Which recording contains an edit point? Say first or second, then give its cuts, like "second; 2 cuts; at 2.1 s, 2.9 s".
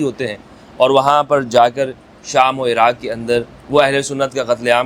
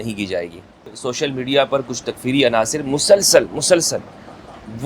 second; 1 cut; at 0.9 s